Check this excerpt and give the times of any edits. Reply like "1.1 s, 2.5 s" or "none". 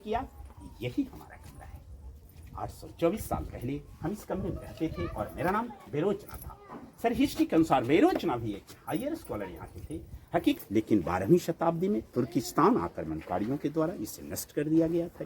10.6 s